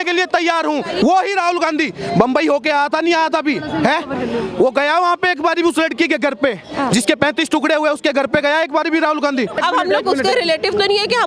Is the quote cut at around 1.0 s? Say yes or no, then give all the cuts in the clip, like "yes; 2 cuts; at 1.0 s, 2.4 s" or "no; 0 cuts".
yes; 2 cuts; at 1.0 s, 9.6 s